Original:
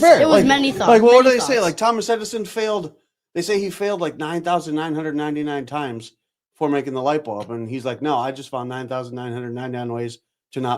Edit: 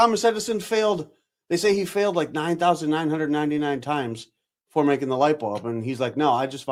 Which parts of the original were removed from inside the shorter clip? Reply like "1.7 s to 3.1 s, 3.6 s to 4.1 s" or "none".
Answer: none